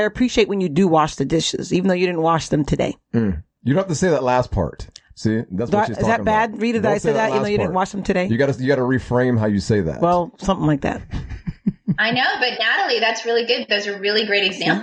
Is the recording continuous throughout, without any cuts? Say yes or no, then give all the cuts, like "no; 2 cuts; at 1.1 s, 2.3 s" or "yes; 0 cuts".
yes; 0 cuts